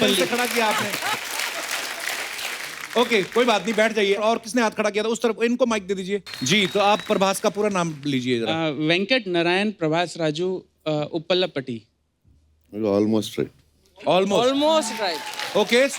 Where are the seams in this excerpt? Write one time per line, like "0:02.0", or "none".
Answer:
0:06.3